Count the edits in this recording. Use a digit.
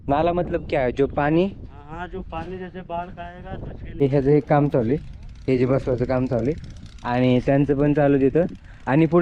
1